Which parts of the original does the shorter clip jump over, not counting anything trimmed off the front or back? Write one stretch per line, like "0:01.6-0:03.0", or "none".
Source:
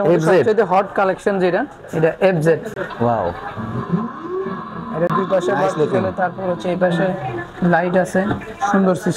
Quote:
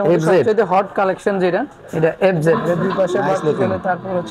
0:02.6-0:04.9